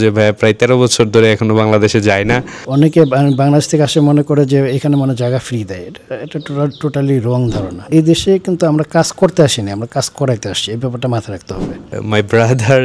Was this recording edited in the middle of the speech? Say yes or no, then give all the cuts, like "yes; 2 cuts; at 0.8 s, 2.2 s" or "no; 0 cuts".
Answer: yes; 3 cuts; at 2.5 s, 7.9 s, 12.0 s